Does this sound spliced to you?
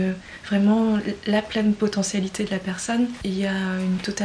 yes; 1 cut; at 3.2 s

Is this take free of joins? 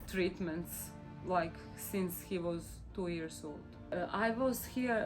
no; 1 cut; at 4.1 s

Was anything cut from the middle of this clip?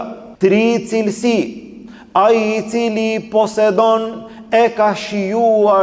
no; 0 cuts

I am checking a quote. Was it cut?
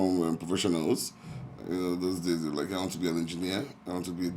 no; 0 cuts

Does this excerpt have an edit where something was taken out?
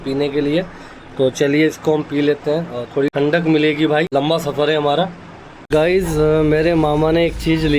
yes; 3 cuts; at 3.1 s, 4.1 s, 5.7 s

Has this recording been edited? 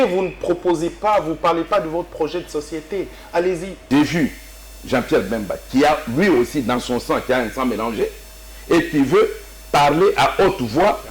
yes; 1 cut; at 3.7 s

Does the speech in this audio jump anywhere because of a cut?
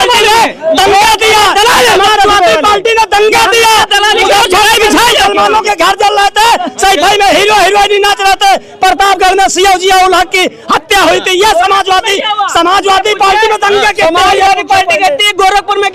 no; 0 cuts

